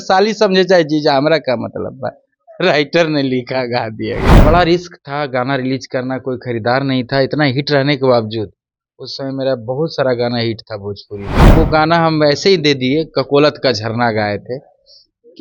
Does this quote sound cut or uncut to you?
cut